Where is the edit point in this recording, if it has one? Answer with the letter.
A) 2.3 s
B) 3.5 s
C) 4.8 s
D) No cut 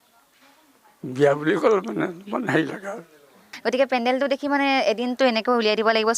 B